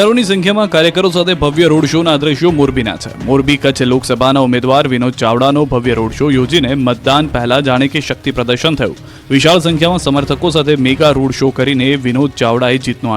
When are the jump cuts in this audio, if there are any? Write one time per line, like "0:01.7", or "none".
0:04.3